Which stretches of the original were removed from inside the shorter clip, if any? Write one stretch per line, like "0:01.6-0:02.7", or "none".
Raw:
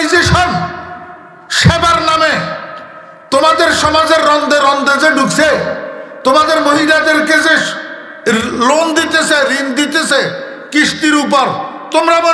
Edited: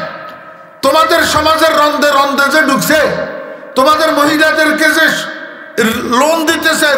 none